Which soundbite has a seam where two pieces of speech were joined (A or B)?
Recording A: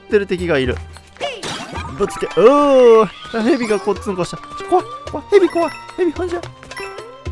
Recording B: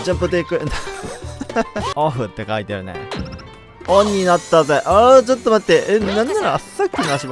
B